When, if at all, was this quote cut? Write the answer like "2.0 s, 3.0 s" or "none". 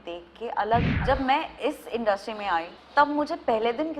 0.9 s, 2.8 s

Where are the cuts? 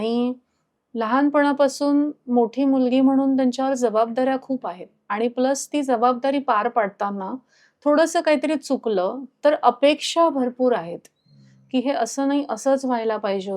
none

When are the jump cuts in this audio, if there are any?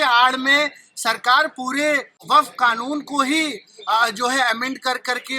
2.2 s

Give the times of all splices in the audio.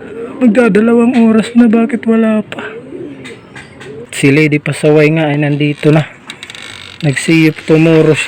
4.1 s

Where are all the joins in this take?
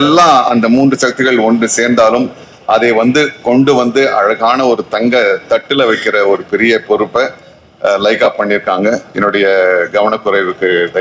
none

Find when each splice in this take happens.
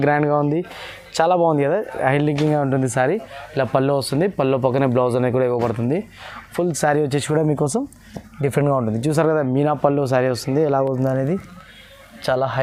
none

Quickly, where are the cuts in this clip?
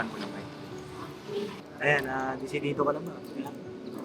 1.7 s

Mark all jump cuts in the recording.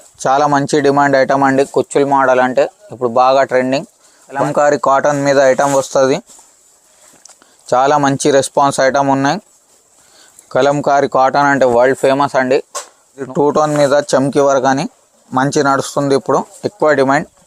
4.4 s, 13.3 s

